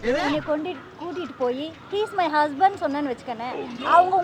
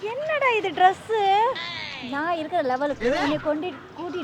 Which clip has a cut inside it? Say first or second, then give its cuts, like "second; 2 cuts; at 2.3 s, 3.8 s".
second; 1 cut; at 1.8 s